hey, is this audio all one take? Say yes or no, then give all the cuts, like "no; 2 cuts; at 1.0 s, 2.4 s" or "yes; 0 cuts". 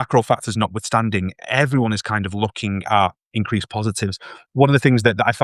yes; 0 cuts